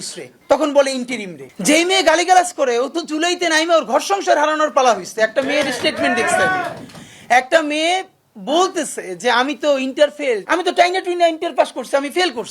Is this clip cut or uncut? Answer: cut